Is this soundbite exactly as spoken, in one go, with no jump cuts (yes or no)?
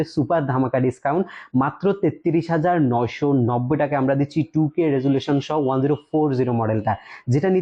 yes